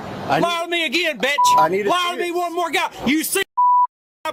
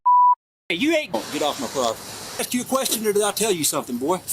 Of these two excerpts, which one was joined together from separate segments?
second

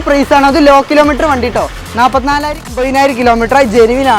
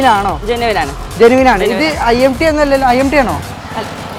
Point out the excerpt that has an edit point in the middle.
first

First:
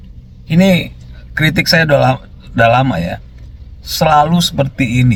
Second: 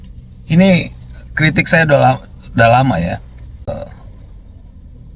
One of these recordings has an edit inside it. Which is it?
second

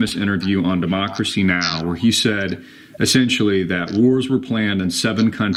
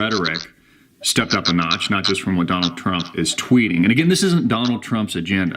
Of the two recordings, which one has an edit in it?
second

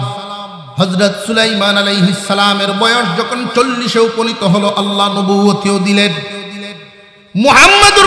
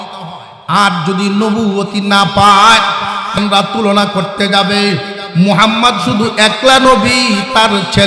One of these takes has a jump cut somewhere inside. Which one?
second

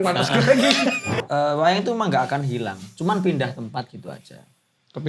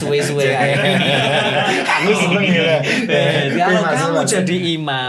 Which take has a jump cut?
first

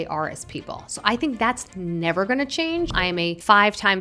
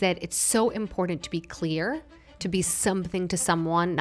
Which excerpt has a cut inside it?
first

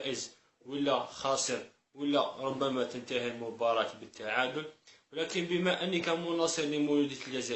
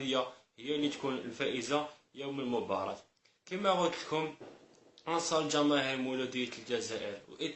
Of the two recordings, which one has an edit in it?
first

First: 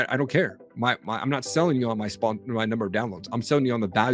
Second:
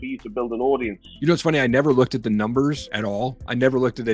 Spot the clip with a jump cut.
second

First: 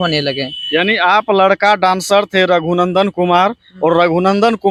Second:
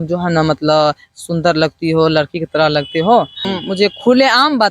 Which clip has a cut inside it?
second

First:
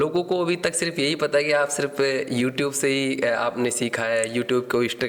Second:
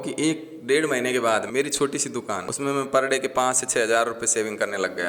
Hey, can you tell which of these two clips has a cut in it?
second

